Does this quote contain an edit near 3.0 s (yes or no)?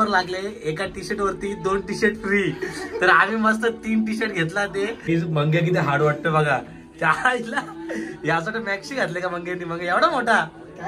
no